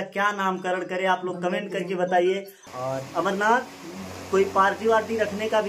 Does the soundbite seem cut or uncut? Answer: cut